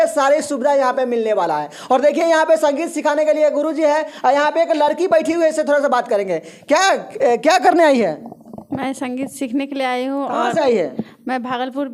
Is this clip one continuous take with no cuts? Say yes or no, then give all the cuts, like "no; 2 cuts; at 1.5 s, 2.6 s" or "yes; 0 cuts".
yes; 0 cuts